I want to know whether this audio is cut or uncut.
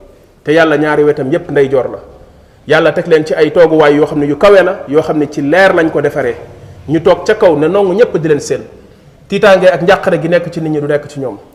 uncut